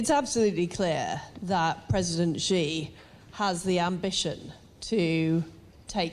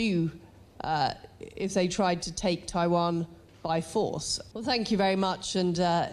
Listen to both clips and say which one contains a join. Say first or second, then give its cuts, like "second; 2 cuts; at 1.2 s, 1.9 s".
second; 1 cut; at 4.3 s